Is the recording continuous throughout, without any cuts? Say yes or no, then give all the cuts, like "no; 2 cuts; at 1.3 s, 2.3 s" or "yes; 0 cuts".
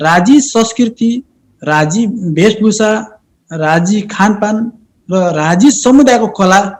yes; 0 cuts